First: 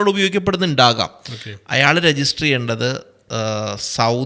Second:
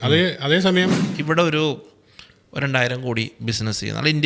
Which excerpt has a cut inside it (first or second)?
second